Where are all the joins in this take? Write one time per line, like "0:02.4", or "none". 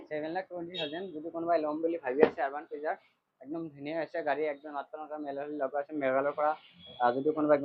none